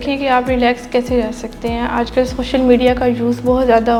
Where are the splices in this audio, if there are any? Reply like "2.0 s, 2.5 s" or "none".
none